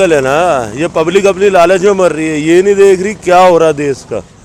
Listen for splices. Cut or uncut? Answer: uncut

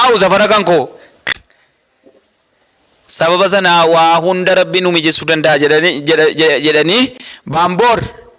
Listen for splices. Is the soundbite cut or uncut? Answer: uncut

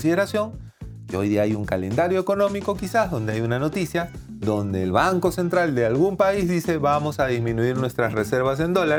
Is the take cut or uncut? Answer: uncut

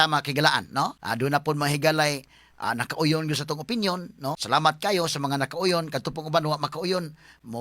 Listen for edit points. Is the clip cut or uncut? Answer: cut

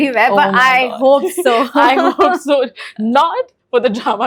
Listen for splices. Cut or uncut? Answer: uncut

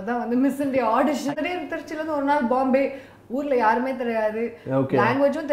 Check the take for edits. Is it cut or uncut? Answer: cut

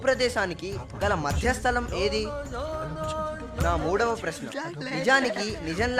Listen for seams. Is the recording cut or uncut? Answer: uncut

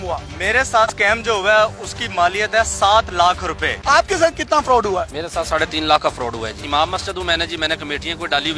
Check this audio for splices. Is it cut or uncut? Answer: cut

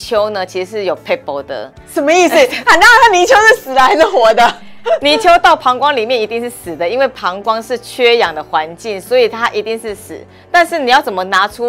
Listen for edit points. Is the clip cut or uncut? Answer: uncut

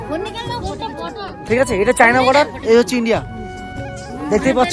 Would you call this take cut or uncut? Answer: uncut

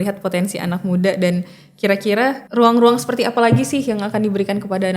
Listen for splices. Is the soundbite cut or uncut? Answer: cut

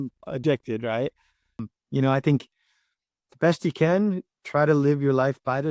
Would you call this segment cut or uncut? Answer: cut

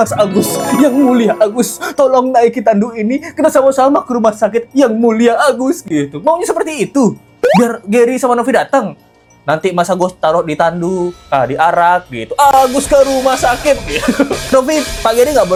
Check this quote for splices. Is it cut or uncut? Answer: uncut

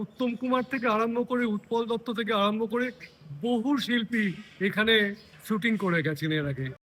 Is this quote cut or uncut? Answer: uncut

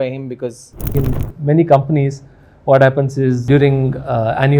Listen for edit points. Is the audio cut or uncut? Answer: cut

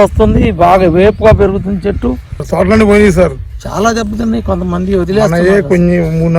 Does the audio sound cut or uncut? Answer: cut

